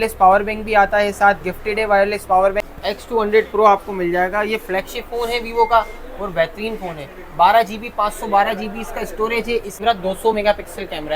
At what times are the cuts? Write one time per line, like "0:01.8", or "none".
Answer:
0:02.7
0:09.7

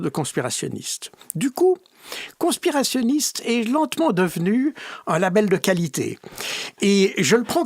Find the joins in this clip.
none

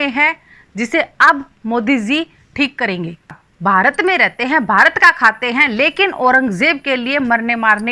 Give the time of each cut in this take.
0:03.5

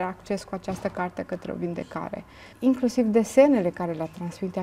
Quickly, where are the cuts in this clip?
0:02.4

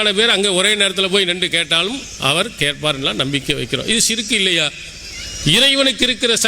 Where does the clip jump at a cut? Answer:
none

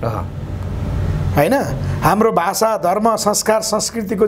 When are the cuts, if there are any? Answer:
none

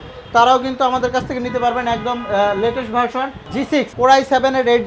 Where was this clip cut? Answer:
0:03.6

